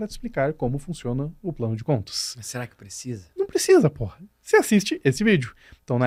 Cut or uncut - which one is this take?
uncut